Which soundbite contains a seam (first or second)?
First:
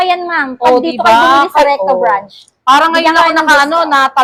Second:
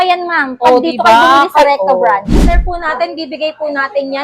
second